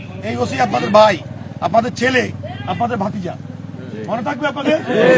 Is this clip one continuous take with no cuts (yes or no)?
yes